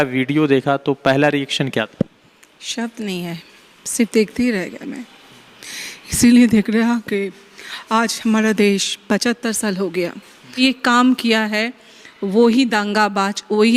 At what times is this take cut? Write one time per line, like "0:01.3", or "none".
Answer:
0:10.6